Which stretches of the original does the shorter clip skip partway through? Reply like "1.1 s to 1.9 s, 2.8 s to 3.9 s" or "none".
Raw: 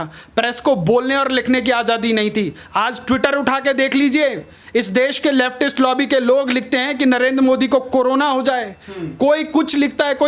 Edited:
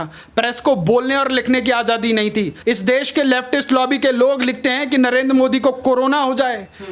2.5 s to 4.6 s